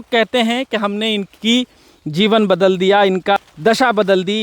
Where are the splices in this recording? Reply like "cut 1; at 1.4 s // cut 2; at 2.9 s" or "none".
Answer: cut 1; at 3.4 s